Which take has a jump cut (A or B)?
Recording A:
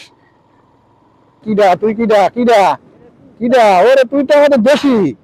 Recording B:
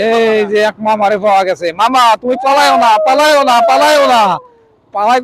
A